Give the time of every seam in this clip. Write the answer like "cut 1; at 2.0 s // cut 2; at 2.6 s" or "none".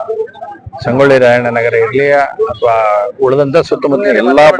none